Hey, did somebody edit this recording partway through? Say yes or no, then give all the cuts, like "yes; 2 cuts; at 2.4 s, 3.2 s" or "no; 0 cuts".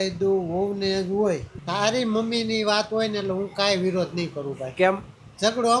yes; 1 cut; at 1.6 s